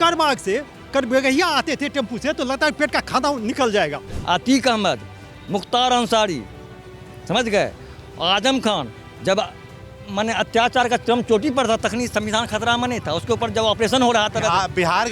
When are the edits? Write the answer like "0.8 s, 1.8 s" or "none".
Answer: 4.1 s